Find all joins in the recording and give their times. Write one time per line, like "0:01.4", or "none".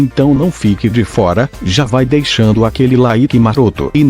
0:01.0